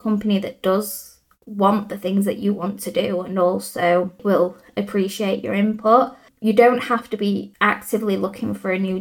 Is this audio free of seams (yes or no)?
no